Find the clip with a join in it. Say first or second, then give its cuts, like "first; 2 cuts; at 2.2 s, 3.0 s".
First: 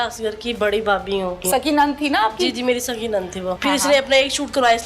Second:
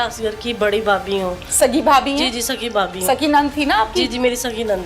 first; 2 cuts; at 1.4 s, 3.5 s